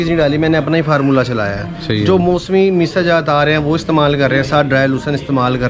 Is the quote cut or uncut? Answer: uncut